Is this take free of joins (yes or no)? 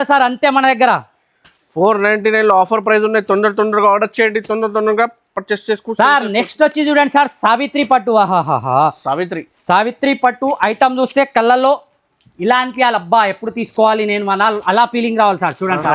yes